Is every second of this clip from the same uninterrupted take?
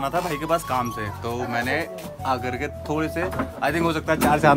yes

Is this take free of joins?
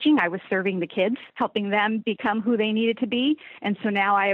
no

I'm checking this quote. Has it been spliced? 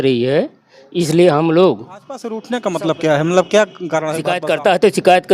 yes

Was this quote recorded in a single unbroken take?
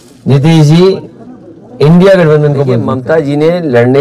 no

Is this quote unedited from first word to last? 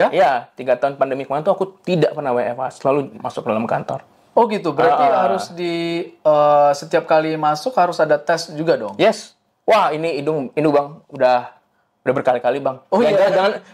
yes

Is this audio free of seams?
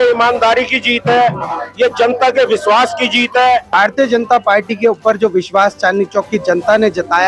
no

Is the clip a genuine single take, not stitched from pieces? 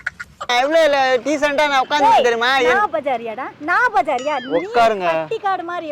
yes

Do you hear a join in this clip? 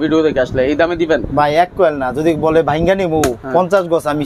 no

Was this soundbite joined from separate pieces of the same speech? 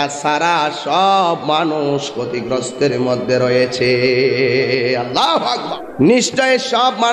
yes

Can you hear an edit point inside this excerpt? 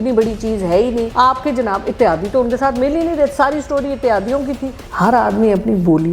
yes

